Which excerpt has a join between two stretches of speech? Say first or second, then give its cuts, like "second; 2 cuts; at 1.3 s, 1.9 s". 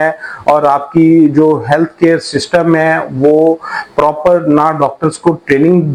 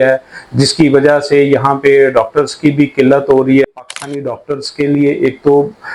second; 1 cut; at 3.6 s